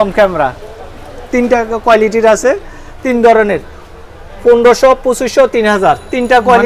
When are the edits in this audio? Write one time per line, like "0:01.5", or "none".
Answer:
none